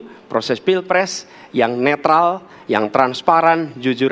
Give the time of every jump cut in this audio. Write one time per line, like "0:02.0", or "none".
none